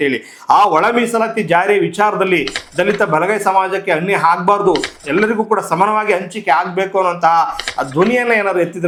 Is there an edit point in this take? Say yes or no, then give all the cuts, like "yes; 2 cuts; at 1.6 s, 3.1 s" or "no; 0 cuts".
no; 0 cuts